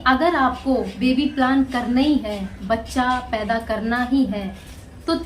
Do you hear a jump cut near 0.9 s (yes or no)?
yes